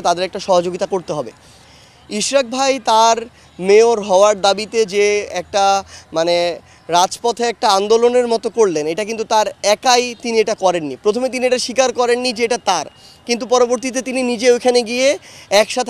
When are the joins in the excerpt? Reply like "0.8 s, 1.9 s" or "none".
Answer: none